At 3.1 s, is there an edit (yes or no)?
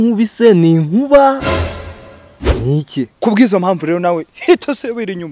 yes